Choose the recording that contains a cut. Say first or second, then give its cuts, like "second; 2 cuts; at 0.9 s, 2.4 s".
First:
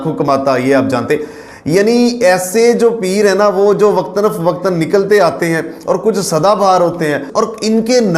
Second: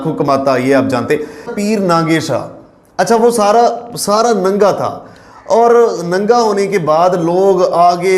second; 1 cut; at 1.5 s